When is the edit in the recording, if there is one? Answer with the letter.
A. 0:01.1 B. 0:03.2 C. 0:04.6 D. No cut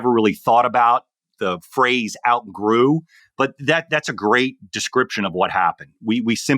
B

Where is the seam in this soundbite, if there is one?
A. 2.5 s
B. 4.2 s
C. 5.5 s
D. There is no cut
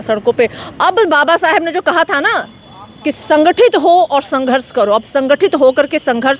D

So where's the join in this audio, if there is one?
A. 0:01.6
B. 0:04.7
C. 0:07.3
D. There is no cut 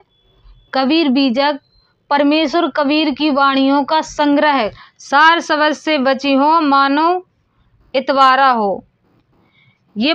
B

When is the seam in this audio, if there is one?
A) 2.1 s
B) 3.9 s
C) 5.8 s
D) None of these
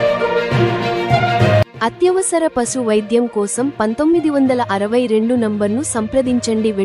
D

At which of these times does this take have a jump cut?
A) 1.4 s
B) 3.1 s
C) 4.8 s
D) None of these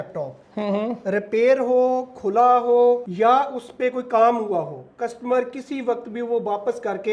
B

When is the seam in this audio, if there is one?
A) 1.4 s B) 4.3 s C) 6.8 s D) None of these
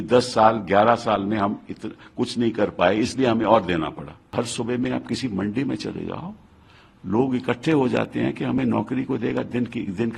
B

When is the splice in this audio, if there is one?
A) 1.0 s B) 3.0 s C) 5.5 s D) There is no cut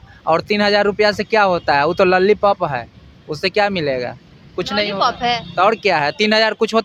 D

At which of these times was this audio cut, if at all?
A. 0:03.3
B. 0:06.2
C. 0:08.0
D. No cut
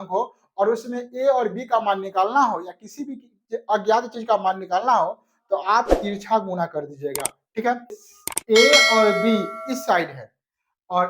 C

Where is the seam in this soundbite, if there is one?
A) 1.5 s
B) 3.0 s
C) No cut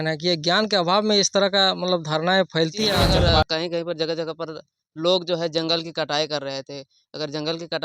B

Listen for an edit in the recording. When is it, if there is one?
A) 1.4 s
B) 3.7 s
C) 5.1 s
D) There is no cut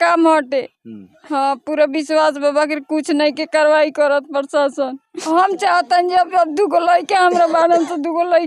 C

